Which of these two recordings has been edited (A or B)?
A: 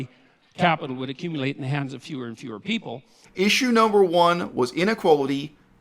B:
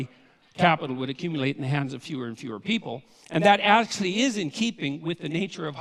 A